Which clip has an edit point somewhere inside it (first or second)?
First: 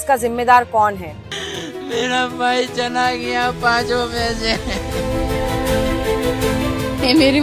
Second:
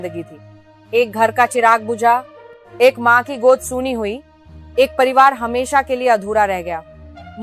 first